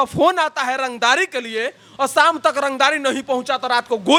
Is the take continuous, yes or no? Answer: yes